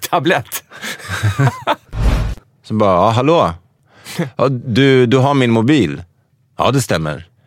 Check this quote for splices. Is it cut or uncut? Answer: cut